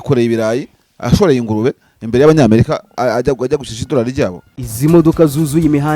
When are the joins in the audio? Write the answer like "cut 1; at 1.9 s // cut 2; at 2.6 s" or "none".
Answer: cut 1; at 4.6 s